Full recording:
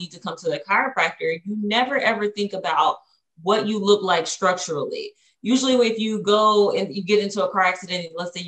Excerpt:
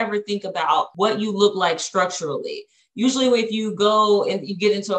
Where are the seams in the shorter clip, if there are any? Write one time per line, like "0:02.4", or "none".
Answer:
0:00.9